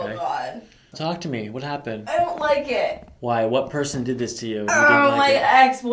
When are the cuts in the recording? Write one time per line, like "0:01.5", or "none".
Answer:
0:00.9